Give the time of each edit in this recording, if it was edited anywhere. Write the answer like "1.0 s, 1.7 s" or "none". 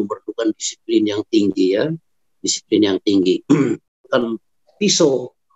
4.0 s